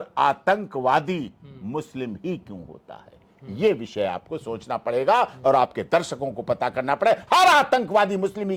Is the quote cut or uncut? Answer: uncut